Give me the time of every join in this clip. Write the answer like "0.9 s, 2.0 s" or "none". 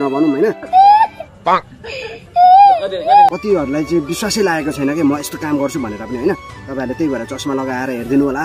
3.4 s